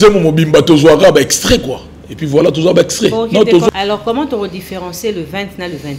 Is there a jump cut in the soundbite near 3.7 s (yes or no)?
yes